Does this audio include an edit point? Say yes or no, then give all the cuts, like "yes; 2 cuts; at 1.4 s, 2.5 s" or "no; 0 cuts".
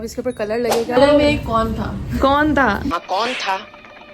yes; 1 cut; at 1.0 s